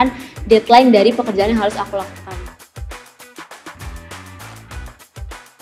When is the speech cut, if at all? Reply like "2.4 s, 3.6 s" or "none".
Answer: 2.4 s